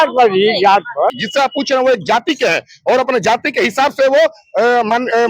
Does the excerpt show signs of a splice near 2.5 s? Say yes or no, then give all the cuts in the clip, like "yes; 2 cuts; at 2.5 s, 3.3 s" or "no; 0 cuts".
no; 1 cut; at 1.2 s